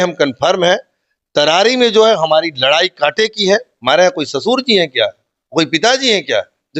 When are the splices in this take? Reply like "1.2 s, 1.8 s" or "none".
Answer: 3.7 s